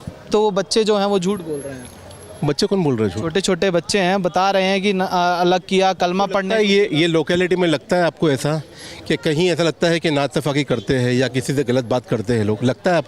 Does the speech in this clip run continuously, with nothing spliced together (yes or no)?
yes